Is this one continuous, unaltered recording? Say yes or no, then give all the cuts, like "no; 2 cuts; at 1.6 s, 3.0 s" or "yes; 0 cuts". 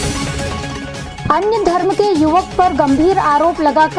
yes; 0 cuts